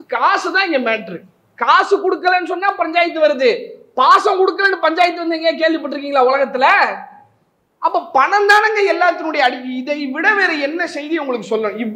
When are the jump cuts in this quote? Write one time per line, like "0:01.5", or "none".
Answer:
none